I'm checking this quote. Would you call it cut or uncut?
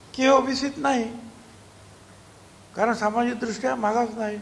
uncut